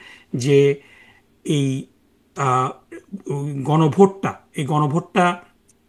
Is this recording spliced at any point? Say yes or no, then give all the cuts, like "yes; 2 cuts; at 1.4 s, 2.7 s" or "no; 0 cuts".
no; 0 cuts